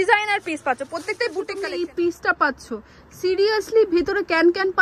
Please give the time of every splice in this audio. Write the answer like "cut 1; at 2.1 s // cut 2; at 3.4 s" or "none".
cut 1; at 1.5 s